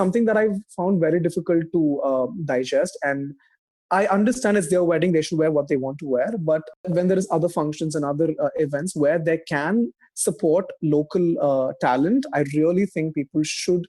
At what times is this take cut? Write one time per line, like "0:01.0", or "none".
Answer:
0:06.8

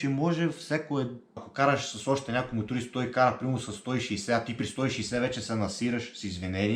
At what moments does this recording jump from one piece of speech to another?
0:01.5

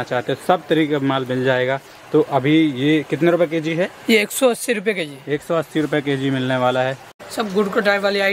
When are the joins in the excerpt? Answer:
0:07.1

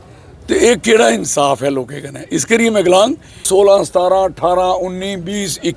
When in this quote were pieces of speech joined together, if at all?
0:03.4

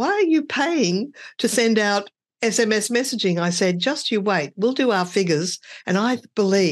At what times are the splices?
none

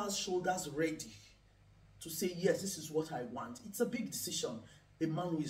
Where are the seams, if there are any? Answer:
none

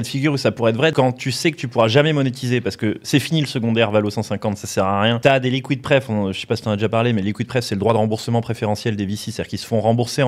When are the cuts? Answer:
0:00.9
0:05.2

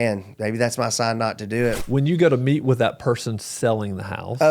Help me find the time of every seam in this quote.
0:01.8

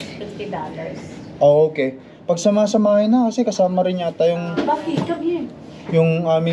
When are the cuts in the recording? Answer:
none

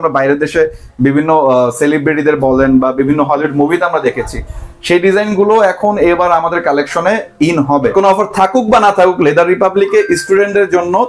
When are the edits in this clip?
0:07.9

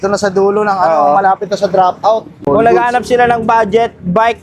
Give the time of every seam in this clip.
0:02.3

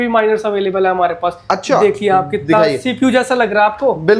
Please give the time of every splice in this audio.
none

